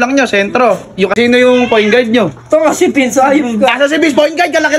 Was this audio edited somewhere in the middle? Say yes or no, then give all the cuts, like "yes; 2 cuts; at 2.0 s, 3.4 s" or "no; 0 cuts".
yes; 1 cut; at 1.1 s